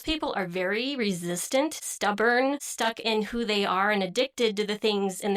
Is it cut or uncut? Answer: cut